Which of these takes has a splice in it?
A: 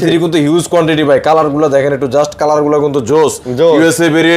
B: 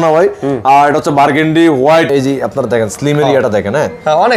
B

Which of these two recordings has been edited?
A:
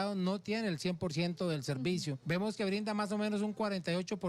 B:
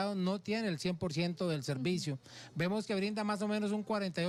A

